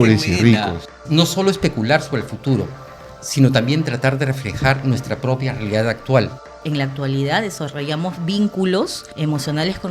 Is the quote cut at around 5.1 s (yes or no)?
no